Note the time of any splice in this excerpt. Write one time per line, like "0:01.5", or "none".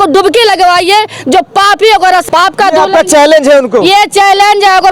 none